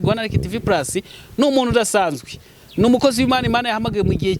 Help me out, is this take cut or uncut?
uncut